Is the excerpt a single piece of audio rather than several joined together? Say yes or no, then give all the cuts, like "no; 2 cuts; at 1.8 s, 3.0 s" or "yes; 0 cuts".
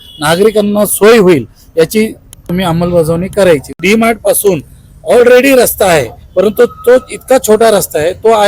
no; 2 cuts; at 2.4 s, 3.8 s